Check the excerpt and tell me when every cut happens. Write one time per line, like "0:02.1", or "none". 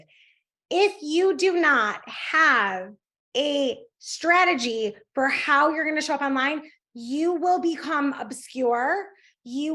none